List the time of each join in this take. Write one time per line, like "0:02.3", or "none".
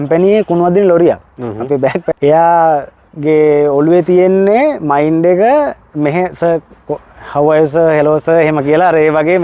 0:02.1